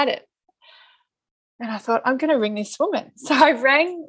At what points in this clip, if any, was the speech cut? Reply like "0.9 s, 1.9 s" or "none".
none